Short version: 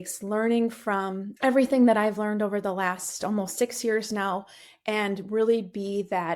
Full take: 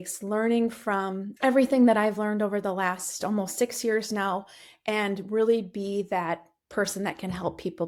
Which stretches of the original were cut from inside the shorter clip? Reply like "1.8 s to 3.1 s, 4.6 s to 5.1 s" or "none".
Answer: none

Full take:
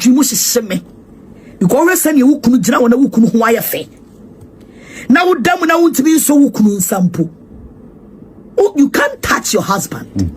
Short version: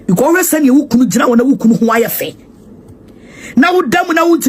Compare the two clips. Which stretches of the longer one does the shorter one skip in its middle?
none

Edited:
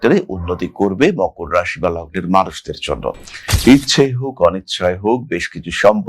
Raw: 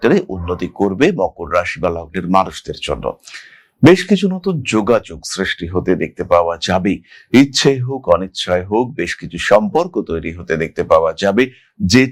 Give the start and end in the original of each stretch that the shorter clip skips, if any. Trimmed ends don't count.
3.4 s to 7.1 s

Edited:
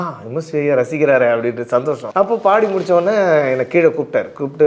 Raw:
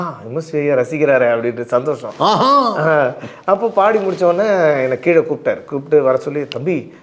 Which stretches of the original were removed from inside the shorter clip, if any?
2.0 s to 3.3 s

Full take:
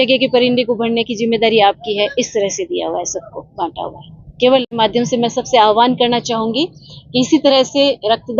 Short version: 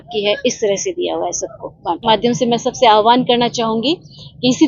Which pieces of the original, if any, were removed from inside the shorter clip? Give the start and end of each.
3.7 s to 4.7 s

